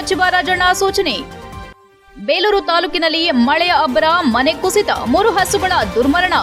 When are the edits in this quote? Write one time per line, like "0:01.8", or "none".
none